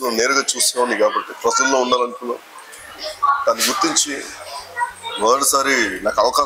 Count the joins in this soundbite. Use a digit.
0